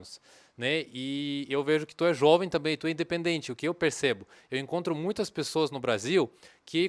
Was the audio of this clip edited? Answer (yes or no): no